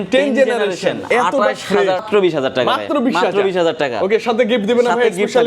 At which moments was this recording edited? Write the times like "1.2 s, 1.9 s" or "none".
2.0 s

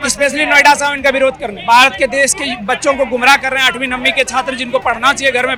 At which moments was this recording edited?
none

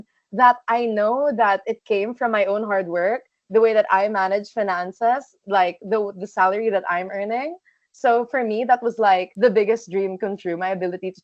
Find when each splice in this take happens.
none

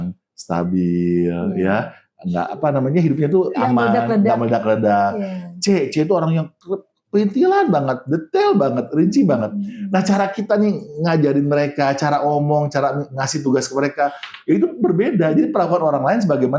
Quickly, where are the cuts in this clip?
none

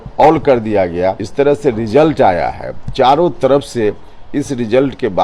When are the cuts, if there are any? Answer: 1.2 s

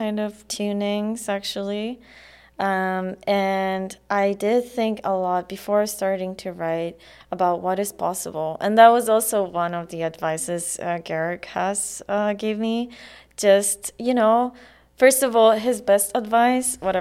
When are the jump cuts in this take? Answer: none

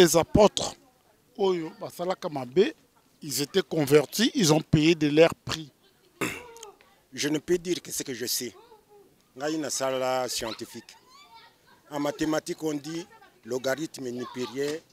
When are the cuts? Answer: 6.2 s

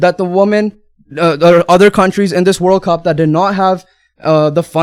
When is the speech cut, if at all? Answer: none

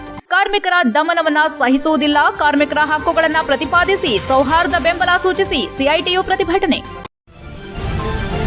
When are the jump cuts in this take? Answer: 6.9 s

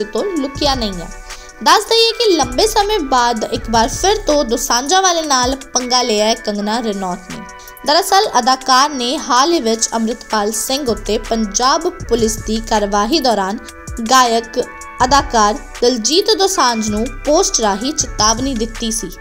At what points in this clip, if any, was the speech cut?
1.1 s

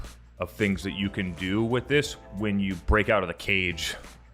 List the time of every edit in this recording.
2.8 s

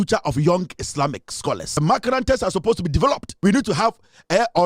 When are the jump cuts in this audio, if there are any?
1.7 s, 3.3 s

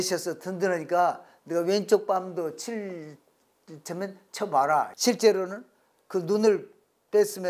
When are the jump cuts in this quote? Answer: 4.9 s

